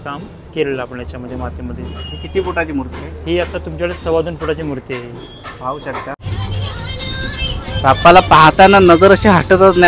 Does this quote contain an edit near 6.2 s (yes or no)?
yes